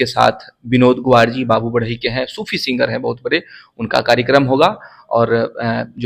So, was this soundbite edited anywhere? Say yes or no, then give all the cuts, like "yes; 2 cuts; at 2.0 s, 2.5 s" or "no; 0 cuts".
no; 0 cuts